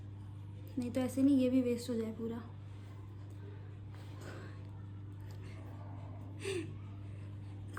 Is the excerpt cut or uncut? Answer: uncut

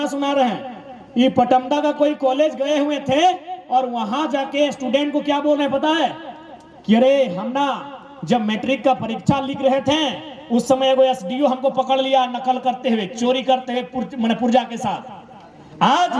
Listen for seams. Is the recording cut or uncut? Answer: uncut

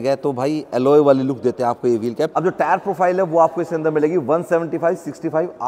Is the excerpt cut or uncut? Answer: uncut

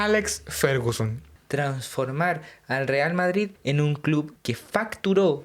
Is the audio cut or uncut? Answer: cut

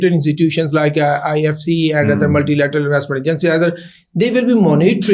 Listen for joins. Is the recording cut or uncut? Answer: uncut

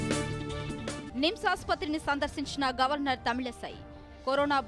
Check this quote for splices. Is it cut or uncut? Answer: cut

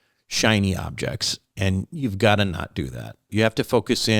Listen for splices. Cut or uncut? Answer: cut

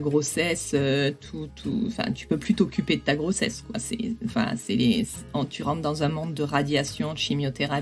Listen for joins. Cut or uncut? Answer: uncut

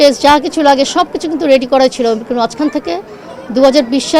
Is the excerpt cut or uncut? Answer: uncut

